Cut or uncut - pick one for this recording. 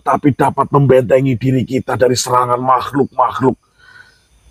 uncut